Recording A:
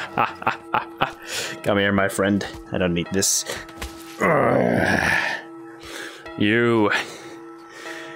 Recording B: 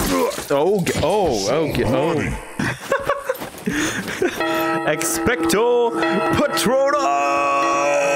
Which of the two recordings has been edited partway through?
B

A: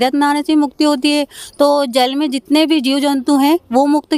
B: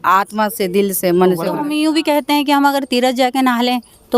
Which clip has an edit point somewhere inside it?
B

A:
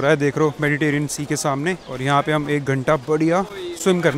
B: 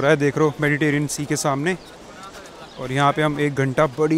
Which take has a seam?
A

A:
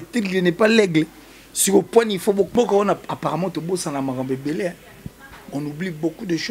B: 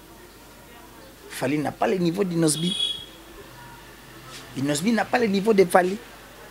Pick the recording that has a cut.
A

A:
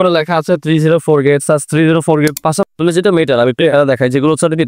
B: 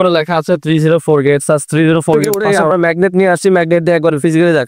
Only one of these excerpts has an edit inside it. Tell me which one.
A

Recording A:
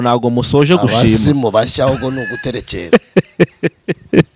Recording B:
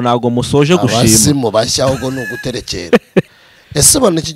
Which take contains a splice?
B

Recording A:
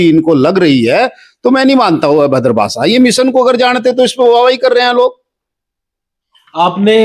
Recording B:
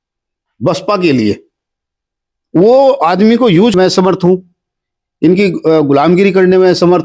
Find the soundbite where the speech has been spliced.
B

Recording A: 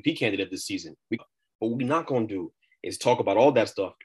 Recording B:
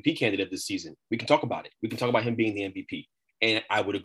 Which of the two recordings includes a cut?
A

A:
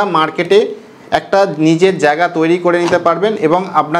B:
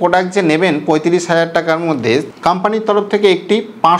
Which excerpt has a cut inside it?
B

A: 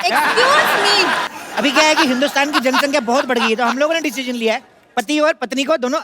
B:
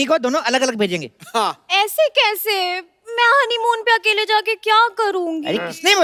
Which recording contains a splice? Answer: A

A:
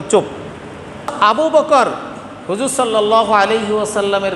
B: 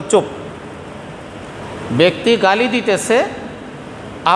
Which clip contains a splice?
A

